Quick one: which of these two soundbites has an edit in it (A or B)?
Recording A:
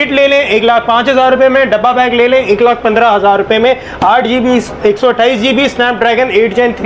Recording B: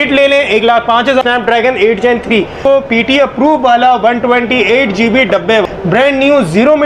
B